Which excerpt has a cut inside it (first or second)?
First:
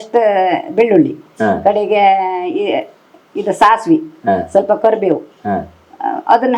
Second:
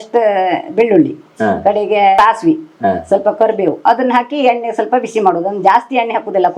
second